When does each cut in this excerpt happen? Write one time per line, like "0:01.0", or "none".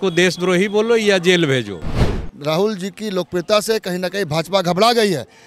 0:02.0